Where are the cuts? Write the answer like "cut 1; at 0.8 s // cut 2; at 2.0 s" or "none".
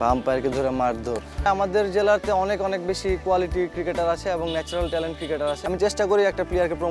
cut 1; at 1.5 s // cut 2; at 5.6 s